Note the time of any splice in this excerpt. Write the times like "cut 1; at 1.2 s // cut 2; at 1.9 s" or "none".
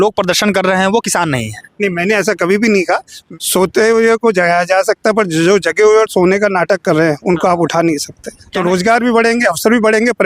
cut 1; at 3.1 s // cut 2; at 8.4 s